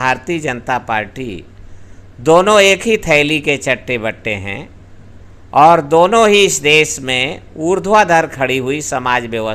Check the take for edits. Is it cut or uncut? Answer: uncut